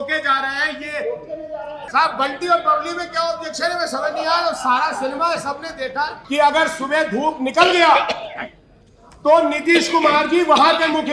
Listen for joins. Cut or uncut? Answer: cut